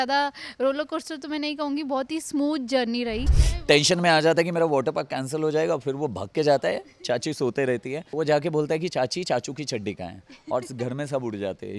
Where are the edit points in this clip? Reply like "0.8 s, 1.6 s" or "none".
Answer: 3.4 s, 8.1 s